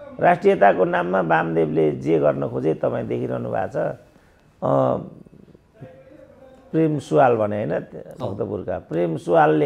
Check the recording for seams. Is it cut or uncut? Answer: uncut